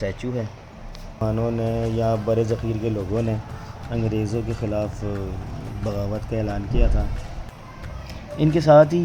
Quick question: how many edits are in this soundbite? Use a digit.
1